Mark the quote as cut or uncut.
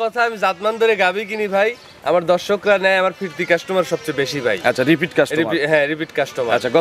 uncut